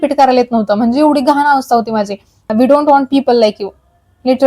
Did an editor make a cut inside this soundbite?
yes; 1 cut; at 2.5 s

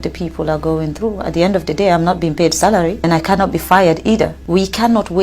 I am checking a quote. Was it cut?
yes; 2 cuts; at 3.0 s, 4.4 s

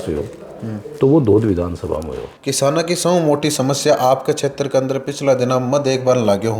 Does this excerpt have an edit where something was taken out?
yes; 1 cut; at 2.2 s

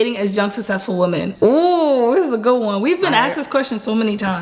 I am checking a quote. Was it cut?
yes; 1 cut; at 1.3 s

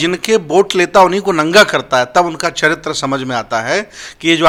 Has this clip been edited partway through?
no; 0 cuts

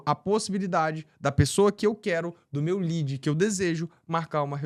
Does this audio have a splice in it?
no; 0 cuts

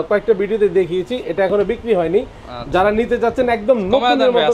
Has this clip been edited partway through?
no; 0 cuts

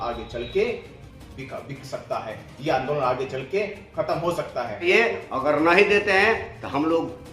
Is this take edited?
yes; 1 cut; at 4.9 s

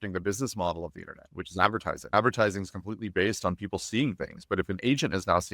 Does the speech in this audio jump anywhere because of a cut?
yes; 1 cut; at 2.1 s

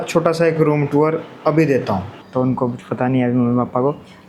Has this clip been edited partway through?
yes; 1 cut; at 2.2 s

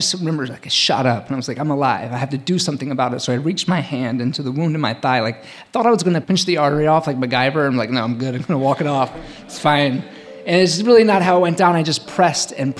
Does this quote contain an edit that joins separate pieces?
yes; 1 cut; at 6.2 s

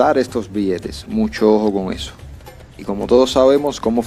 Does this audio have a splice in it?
no; 0 cuts

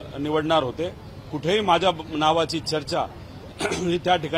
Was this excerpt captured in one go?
yes; 0 cuts

